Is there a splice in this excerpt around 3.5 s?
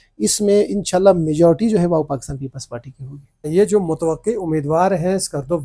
yes; 1 cut; at 3.5 s

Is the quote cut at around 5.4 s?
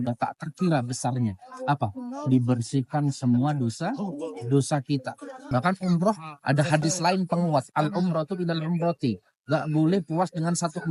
yes; 1 cut; at 5.4 s

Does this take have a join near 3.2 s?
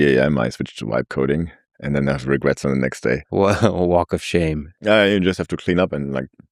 yes; 2 cuts; at 3.2 s, 4.7 s

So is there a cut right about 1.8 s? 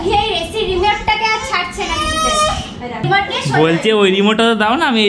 no; 1 cut; at 3.0 s

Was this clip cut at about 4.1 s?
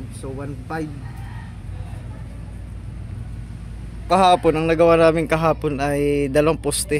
yes; 1 cut; at 4.1 s

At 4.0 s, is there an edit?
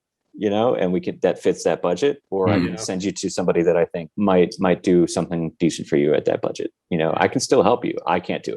yes; 1 cut; at 4.0 s

